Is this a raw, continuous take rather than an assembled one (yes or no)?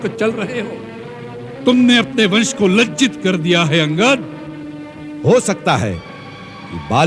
yes